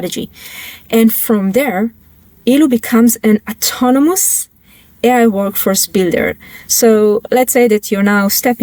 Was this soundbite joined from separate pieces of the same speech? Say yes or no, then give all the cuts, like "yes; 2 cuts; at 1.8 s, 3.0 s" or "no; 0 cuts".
no; 0 cuts